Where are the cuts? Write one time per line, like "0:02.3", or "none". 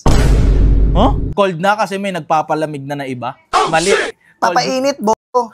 0:01.2